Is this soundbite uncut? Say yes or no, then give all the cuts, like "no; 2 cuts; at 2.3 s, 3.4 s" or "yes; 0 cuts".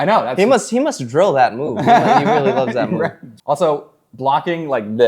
no; 1 cut; at 3.3 s